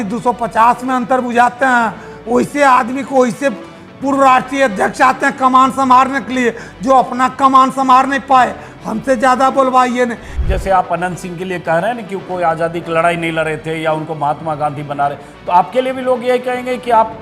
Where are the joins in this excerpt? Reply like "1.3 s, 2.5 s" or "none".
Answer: 10.4 s